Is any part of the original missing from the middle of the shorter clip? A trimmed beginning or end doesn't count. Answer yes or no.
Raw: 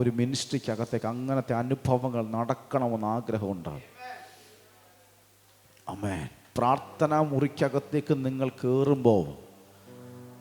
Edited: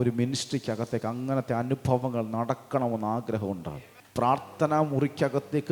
yes